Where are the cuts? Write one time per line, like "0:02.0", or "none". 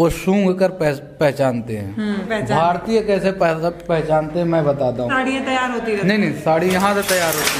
0:02.3
0:05.1